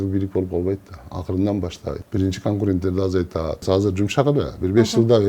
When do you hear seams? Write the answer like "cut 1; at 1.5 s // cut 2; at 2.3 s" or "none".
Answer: cut 1; at 2.0 s // cut 2; at 3.6 s